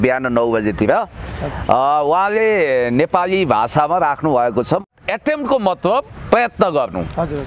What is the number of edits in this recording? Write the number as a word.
one